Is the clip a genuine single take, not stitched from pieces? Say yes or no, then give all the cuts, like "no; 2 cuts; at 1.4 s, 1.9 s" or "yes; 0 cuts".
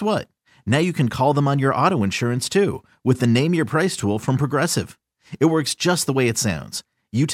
yes; 0 cuts